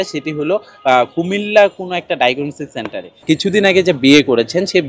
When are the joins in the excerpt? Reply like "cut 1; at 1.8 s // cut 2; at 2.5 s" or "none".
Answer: cut 1; at 3.2 s

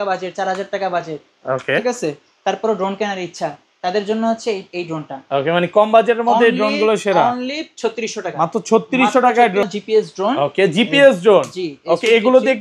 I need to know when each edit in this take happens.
cut 1; at 9.7 s

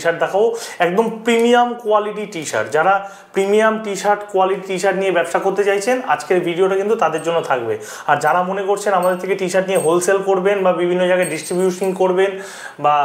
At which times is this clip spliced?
none

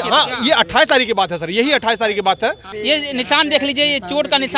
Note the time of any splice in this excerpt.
cut 1; at 2.7 s

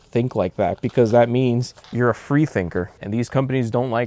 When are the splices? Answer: cut 1; at 1.8 s // cut 2; at 3.0 s

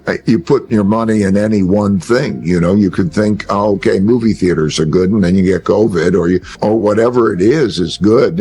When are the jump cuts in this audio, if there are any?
cut 1; at 6.5 s

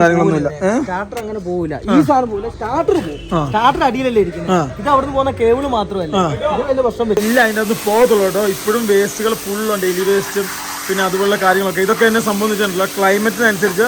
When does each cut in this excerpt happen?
cut 1; at 7.2 s

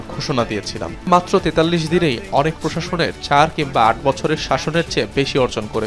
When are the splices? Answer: cut 1; at 1.1 s

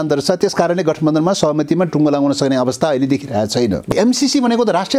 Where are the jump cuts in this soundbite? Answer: cut 1; at 3.9 s

